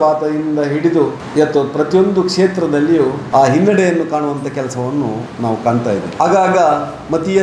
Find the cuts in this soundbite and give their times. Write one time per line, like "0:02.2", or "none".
0:01.2
0:03.2
0:06.2